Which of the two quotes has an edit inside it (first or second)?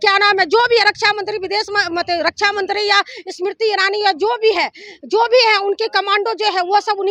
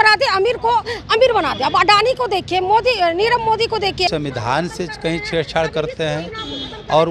second